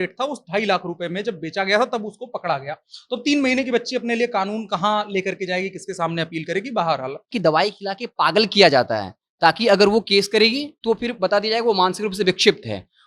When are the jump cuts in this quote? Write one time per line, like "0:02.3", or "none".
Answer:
0:07.3